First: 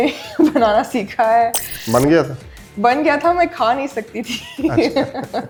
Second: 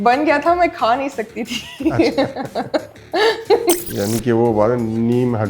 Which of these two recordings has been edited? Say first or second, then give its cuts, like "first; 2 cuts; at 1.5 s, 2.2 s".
second; 1 cut; at 3.9 s